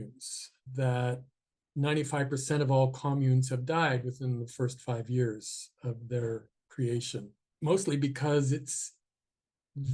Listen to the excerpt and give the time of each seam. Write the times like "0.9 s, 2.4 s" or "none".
6.6 s, 7.4 s